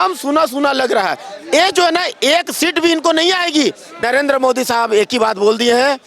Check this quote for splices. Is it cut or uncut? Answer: cut